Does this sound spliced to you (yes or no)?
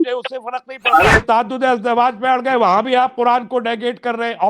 yes